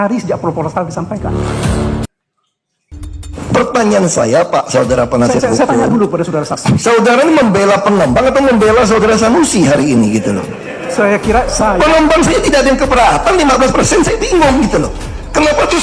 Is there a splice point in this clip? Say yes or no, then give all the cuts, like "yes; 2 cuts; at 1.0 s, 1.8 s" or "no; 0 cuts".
no; 0 cuts